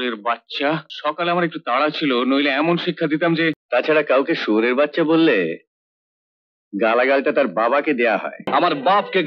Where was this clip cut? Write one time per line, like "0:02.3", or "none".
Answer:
0:00.9
0:03.6
0:08.5